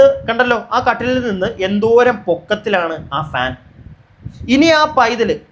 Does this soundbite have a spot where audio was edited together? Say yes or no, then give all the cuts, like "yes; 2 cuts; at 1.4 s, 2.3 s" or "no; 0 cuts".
no; 0 cuts